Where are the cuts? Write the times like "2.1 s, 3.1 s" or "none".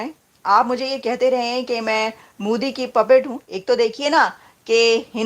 3.4 s

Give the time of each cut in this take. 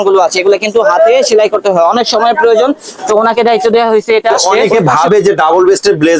4.4 s

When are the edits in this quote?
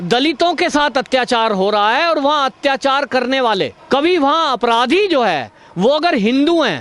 3.8 s

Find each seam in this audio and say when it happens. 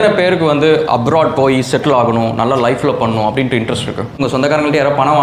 4.2 s

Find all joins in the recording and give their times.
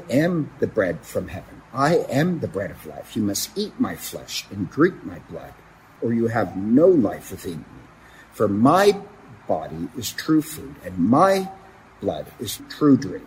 5.8 s

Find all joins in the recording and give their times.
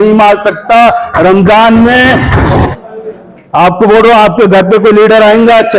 2.7 s

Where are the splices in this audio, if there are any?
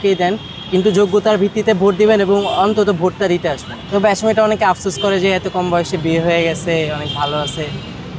3.7 s

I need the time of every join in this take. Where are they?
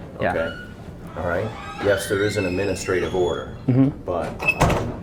none

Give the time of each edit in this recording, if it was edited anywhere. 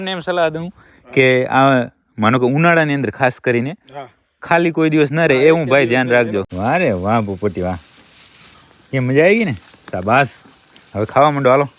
6.5 s

